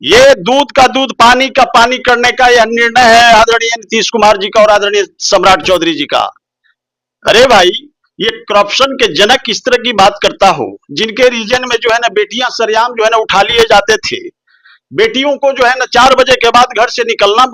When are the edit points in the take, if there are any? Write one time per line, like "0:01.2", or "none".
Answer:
none